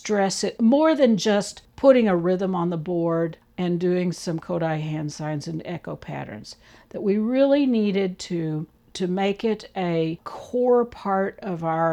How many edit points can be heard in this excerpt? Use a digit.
0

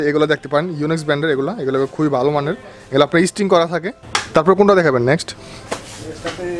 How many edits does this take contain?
0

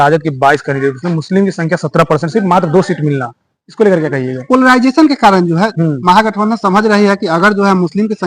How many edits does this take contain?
0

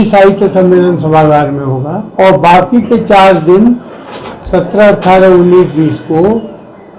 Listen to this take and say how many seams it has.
1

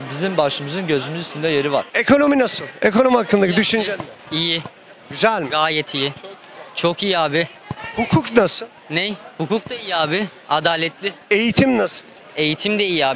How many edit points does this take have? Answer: 1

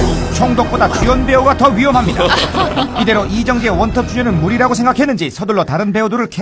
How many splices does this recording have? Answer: 1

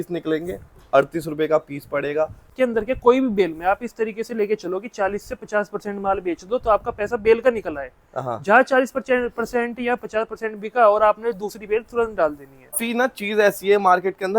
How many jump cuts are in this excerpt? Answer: 2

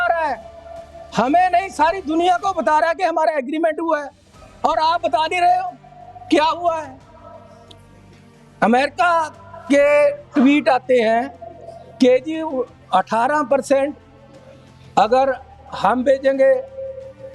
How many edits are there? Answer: 0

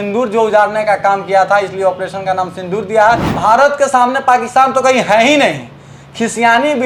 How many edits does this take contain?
1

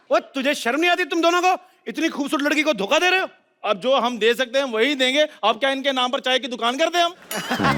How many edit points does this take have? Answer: 0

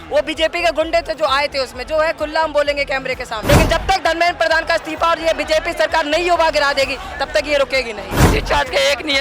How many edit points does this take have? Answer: 2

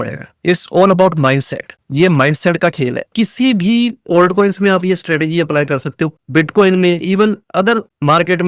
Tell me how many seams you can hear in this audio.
2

